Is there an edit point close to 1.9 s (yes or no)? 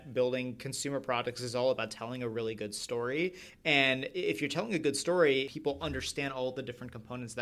no